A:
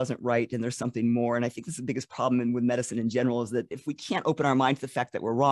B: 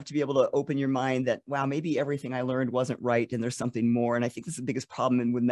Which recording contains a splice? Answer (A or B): A